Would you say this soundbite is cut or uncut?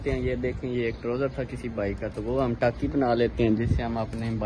cut